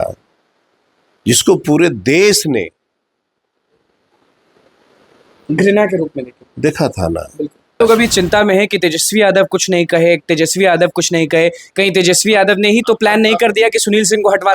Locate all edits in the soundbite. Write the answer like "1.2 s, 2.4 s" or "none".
7.8 s